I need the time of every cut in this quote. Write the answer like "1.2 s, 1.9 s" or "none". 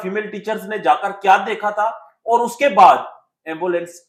none